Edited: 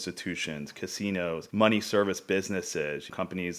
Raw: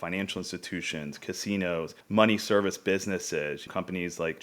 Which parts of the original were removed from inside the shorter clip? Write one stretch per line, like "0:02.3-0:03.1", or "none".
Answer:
0:01.9-0:02.0